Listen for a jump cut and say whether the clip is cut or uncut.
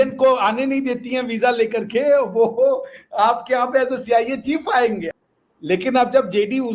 cut